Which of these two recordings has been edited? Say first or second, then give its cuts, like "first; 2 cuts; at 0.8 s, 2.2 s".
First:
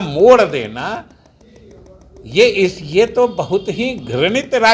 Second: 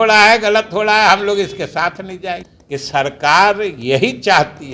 second; 1 cut; at 2.5 s